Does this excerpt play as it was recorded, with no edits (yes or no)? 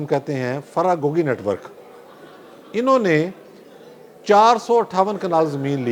yes